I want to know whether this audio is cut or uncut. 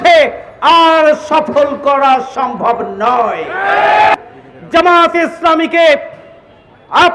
cut